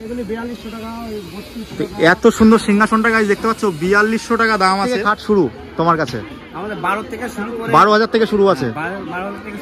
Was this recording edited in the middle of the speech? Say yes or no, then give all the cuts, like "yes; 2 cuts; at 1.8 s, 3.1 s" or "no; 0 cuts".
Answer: yes; 1 cut; at 5.1 s